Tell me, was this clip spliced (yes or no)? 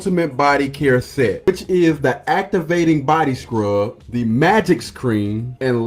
yes